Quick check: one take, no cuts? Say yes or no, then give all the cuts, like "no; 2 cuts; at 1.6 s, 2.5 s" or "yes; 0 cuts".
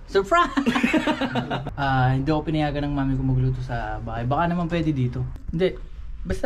no; 2 cuts; at 1.6 s, 5.3 s